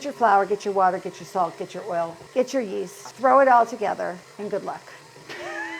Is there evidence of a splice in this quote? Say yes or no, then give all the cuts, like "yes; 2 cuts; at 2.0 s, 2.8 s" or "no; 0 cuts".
yes; 2 cuts; at 3.0 s, 4.3 s